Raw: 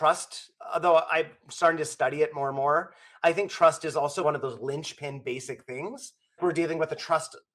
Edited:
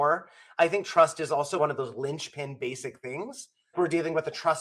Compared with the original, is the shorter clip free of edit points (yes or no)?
yes